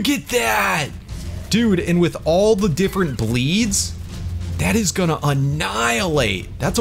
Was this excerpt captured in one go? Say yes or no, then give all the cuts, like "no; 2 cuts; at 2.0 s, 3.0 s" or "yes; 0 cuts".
yes; 0 cuts